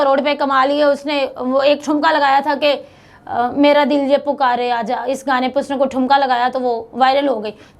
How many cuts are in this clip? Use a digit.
0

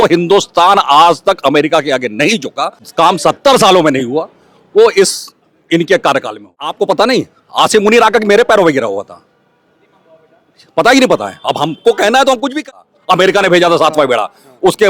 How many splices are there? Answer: 3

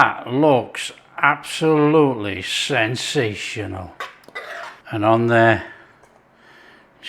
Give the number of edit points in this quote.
0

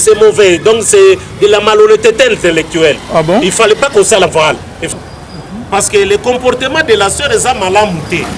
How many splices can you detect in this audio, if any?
1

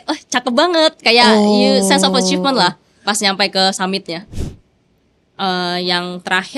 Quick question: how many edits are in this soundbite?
1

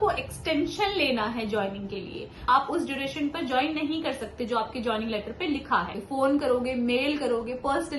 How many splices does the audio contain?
2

